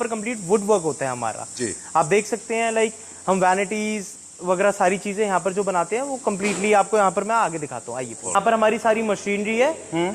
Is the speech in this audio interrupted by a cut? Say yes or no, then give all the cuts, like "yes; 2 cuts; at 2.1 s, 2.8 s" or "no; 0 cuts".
no; 0 cuts